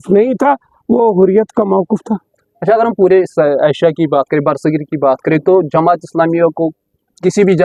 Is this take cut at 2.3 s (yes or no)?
no